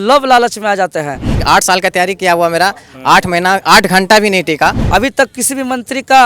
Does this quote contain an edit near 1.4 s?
yes; 2 cuts; at 1.4 s, 4.8 s

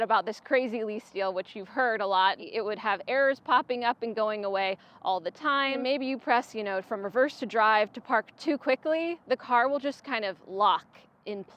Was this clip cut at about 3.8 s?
no; 2 cuts; at 2.4 s, 5.8 s

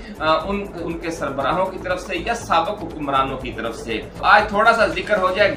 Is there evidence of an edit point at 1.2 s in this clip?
no; 1 cut; at 4.2 s

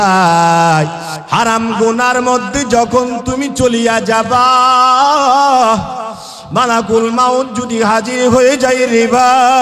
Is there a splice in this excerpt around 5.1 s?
no; 1 cut; at 1.1 s

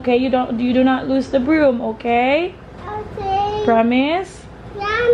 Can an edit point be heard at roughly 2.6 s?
no; 0 cuts

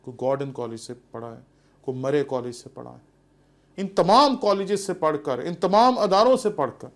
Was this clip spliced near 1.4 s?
no; 0 cuts

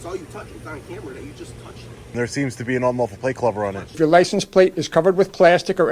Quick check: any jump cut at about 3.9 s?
yes; 2 cuts; at 2.1 s, 3.9 s

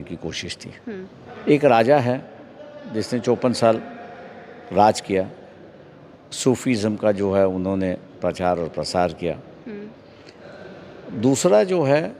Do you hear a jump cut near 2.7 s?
no; 1 cut; at 1.3 s

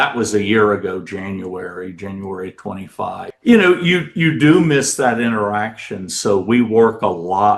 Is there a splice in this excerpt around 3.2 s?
yes; 1 cut; at 3.2 s

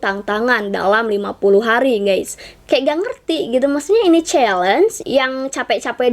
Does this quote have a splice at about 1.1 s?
no; 2 cuts; at 2.5 s, 5.0 s

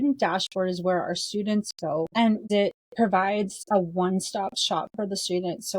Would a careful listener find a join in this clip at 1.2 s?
no; 2 cuts; at 2.5 s, 3.6 s

